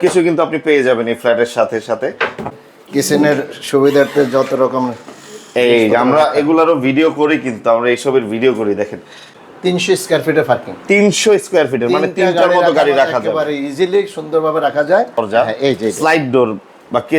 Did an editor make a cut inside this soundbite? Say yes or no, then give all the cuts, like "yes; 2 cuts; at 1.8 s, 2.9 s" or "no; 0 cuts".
yes; 3 cuts; at 2.5 s, 9.3 s, 15.2 s